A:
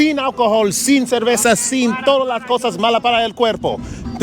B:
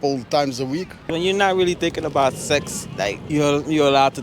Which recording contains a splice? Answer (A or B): B